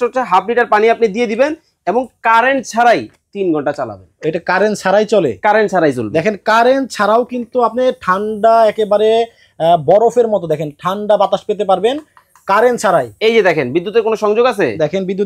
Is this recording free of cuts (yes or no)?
yes